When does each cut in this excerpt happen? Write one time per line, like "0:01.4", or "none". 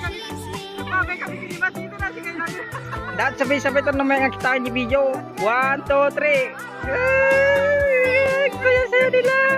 0:08.2